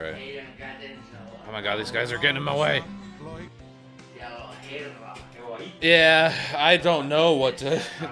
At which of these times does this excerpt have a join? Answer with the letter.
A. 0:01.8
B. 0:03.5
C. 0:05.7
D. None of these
B